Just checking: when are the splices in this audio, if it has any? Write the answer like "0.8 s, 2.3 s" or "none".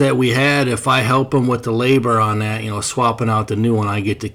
none